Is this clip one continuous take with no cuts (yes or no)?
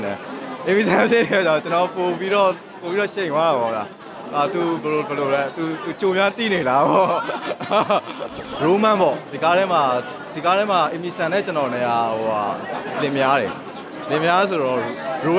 no